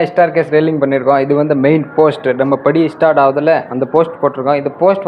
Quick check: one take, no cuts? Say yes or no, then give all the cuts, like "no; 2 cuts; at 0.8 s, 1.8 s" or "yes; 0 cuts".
yes; 0 cuts